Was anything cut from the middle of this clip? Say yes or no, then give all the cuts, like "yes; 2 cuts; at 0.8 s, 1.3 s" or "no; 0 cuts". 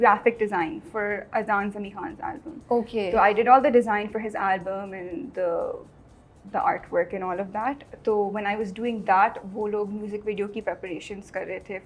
no; 0 cuts